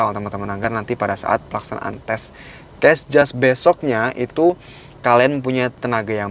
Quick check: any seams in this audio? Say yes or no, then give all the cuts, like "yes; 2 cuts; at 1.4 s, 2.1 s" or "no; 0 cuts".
no; 0 cuts